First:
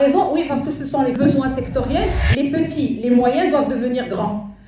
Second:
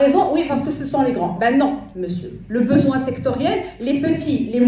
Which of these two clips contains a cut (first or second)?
first